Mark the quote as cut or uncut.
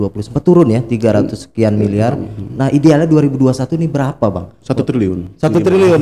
uncut